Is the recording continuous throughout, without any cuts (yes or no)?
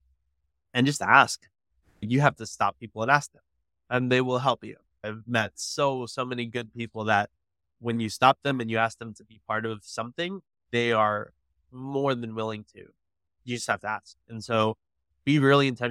no